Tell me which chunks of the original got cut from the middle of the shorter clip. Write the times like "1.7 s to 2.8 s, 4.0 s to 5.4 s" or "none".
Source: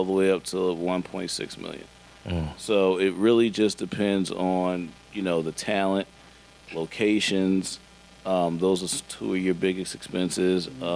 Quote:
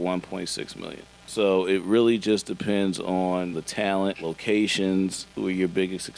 2.0 s to 2.5 s, 5.0 s to 6.2 s, 7.8 s to 9.1 s

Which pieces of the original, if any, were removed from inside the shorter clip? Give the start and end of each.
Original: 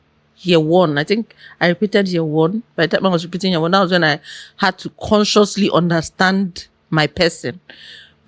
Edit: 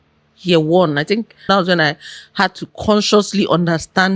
1.5 s to 3.7 s

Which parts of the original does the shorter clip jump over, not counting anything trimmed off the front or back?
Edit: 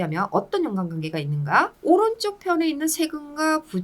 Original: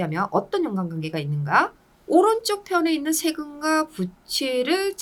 1.8 s to 2.0 s

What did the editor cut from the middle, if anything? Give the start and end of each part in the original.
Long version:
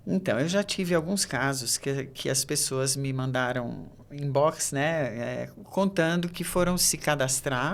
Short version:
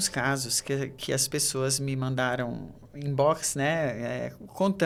none

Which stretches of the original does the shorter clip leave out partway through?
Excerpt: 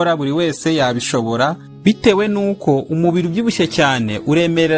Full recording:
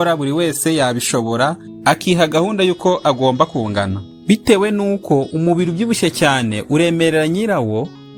1.7 s to 4.1 s

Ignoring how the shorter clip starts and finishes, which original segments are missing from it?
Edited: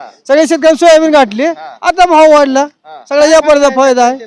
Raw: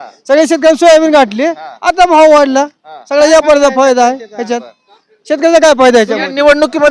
none

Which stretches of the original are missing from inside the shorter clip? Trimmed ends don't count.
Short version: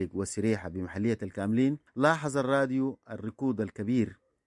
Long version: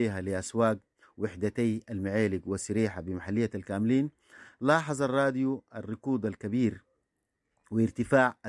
4.2 s to 4.5 s

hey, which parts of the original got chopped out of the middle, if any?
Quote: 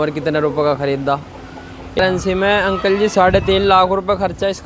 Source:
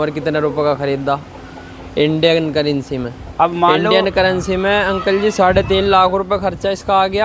2.0 s to 4.2 s

